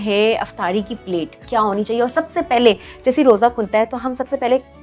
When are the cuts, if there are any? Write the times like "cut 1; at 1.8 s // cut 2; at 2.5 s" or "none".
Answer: cut 1; at 1.4 s